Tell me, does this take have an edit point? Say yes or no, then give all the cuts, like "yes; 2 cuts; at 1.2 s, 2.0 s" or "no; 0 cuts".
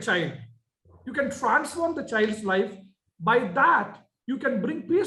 no; 0 cuts